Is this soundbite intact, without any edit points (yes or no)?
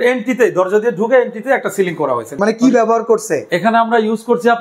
no